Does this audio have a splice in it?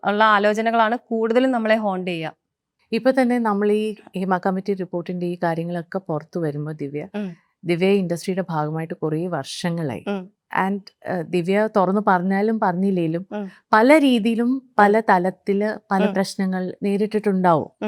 no; 0 cuts

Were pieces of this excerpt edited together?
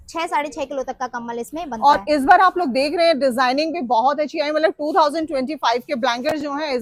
no; 0 cuts

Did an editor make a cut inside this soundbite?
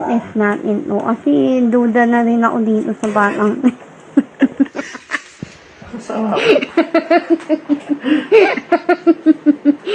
no; 0 cuts

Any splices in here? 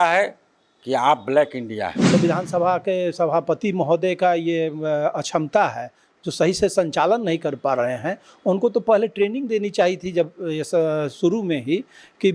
yes; 1 cut; at 2.1 s

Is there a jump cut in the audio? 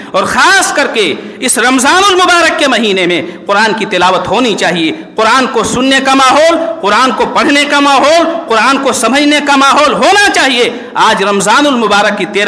no; 0 cuts

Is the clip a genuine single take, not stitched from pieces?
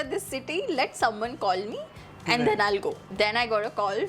no; 1 cut; at 3.1 s

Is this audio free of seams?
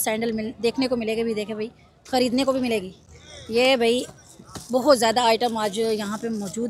yes; 0 cuts

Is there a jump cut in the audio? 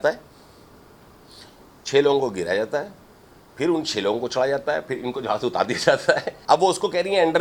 yes; 1 cut; at 6.3 s

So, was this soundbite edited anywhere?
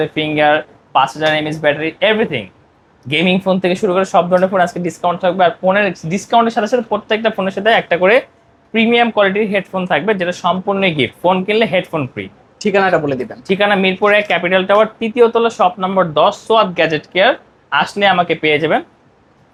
no; 0 cuts

